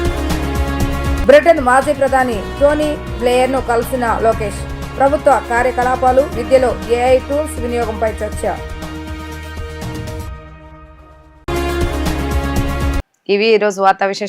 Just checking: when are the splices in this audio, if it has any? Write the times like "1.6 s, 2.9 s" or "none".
none

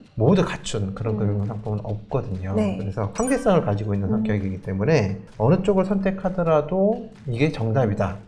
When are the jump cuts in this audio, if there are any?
3.1 s

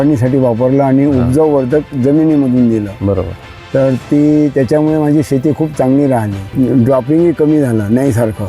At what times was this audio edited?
6.4 s

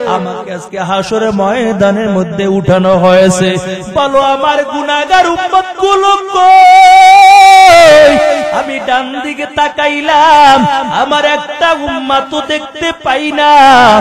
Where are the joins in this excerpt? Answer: none

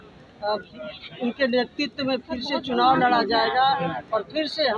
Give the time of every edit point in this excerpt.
none

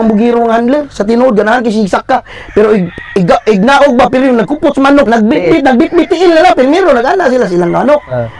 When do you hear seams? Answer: 5.0 s

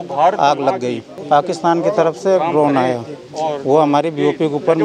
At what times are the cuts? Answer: 1.1 s

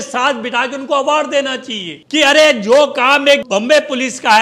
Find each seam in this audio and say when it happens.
3.4 s

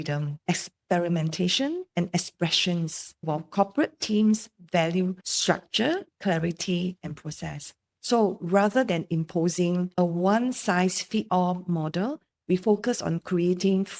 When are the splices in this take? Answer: none

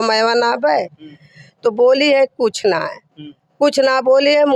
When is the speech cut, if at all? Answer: none

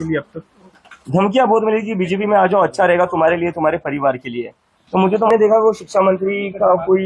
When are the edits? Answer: 5.3 s

